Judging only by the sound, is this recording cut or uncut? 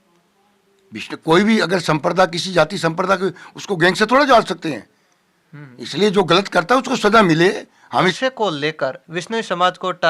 cut